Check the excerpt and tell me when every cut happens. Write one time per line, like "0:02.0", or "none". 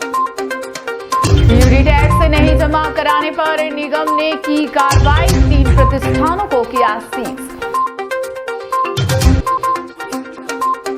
0:01.2